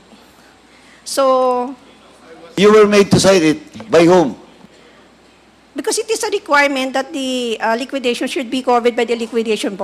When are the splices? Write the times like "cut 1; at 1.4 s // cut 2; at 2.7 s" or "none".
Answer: none